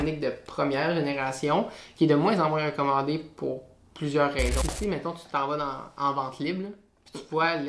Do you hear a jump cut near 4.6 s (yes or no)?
yes